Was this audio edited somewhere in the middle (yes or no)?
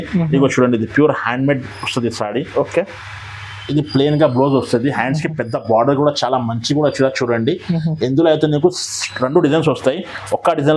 no